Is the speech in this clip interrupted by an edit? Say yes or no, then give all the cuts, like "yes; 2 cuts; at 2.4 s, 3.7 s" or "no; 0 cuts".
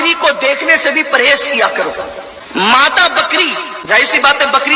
no; 0 cuts